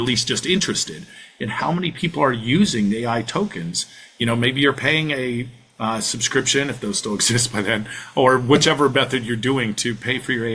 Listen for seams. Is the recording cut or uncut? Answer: uncut